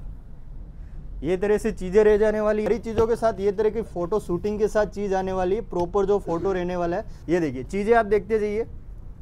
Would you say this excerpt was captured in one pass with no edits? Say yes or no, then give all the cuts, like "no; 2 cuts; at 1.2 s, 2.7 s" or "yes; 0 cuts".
no; 2 cuts; at 2.7 s, 7.1 s